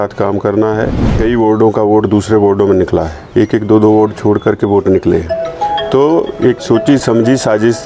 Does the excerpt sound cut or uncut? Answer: cut